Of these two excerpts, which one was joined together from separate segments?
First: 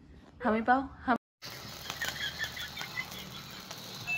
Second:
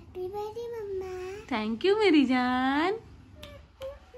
first; 1 cut; at 1.3 s

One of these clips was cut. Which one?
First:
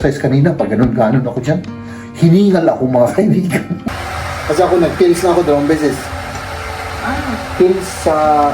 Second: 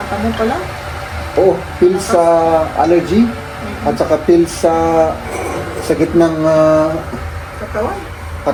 first; 1 cut; at 3.8 s

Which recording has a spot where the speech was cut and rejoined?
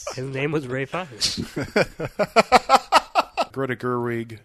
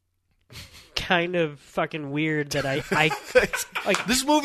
first; 1 cut; at 3.5 s

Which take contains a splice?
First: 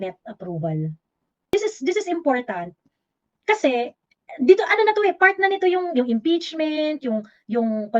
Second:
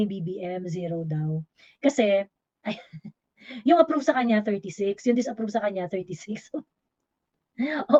first; 1 cut; at 1.5 s

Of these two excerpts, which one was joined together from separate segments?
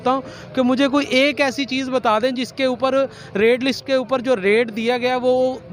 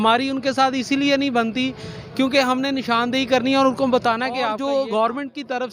second; 1 cut; at 4.5 s

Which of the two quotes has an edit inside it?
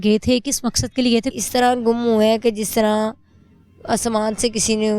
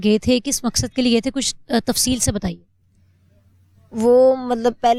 first; 1 cut; at 1.4 s

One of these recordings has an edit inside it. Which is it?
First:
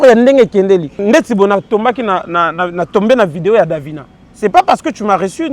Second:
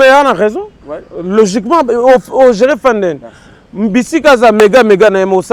first; 1 cut; at 0.9 s

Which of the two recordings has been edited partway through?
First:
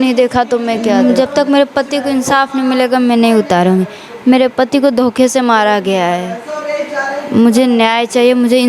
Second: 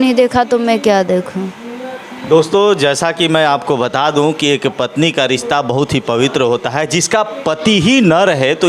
first; 1 cut; at 0.9 s

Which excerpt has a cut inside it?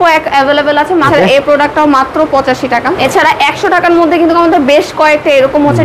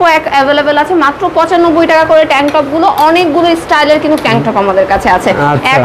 first; 2 cuts; at 1.1 s, 3.0 s

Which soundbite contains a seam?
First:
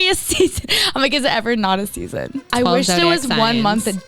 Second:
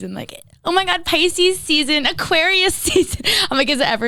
first; 1 cut; at 2.5 s

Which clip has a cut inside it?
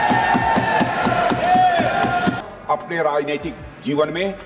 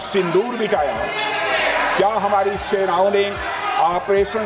first; 1 cut; at 2.4 s

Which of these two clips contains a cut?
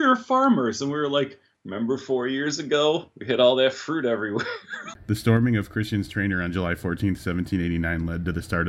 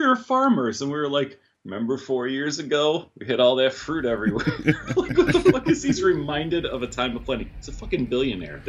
first; 1 cut; at 4.4 s

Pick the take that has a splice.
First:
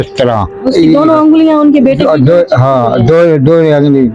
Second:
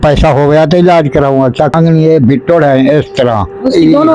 second; 1 cut; at 1.7 s

